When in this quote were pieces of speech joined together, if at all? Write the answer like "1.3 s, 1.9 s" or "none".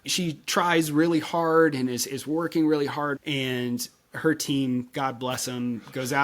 3.1 s